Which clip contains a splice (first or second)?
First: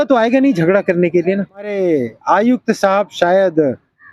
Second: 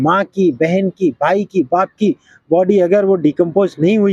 first